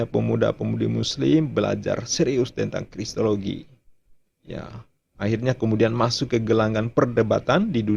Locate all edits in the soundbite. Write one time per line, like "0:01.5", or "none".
none